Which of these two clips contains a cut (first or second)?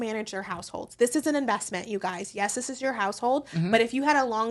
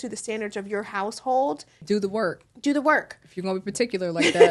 second